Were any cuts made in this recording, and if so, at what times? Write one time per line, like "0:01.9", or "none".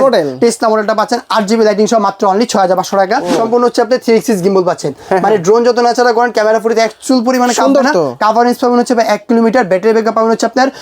0:03.3